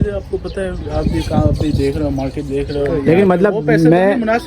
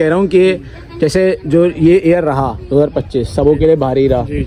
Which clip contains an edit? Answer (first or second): first